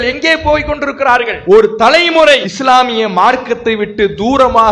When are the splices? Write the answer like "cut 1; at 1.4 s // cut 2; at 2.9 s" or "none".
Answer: cut 1; at 1.3 s // cut 2; at 2.5 s